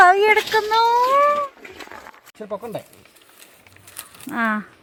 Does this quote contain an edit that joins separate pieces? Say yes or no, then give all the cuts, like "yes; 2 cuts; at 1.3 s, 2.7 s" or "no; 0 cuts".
no; 0 cuts